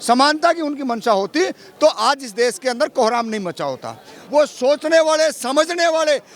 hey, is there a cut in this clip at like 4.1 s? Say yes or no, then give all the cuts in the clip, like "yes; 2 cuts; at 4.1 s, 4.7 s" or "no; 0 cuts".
yes; 1 cut; at 4.1 s